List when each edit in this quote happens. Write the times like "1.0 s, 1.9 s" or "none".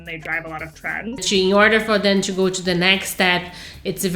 1.2 s